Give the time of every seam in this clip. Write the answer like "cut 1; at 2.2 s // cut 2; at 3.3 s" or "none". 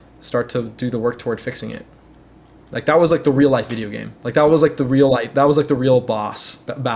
none